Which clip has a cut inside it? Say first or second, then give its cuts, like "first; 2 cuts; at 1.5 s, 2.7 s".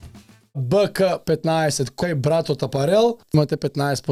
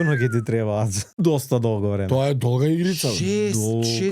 second; 1 cut; at 1.0 s